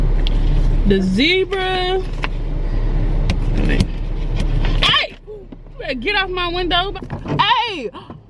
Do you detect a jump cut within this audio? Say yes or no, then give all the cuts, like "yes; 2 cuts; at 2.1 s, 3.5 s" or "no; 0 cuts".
yes; 1 cut; at 7.0 s